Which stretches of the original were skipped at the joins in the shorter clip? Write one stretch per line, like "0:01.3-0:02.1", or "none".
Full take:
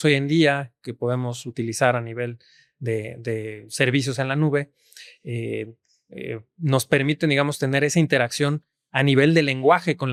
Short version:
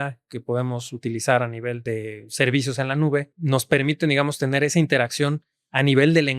0:02.3-0:03.2
0:04.7-0:06.5